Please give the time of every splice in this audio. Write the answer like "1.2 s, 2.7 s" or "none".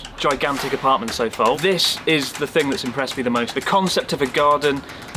1.6 s, 3.5 s